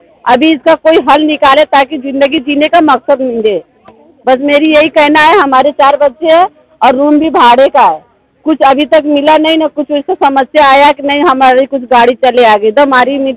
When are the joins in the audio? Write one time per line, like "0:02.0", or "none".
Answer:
none